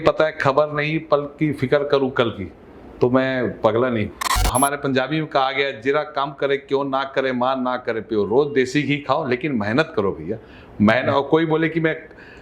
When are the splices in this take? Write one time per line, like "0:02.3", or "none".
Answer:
0:04.4